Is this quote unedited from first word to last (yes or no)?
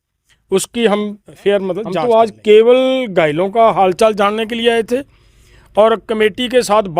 no